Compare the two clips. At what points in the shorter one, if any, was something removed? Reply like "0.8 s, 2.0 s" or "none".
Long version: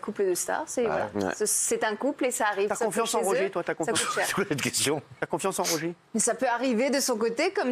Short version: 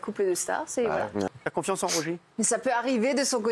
1.3 s